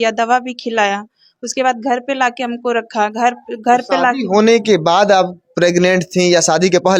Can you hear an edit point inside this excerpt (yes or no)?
no